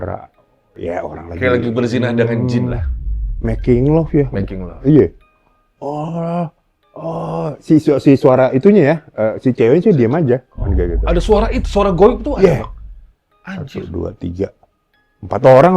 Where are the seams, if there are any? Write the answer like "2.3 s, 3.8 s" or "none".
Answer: none